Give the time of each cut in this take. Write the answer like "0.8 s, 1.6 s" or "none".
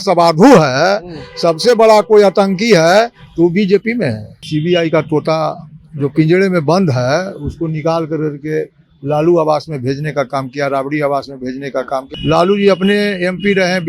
4.3 s, 12.1 s